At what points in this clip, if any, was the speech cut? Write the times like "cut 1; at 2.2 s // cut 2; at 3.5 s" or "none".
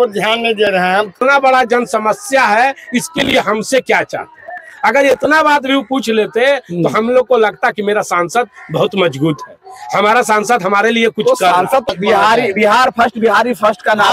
cut 1; at 1.2 s // cut 2; at 11.9 s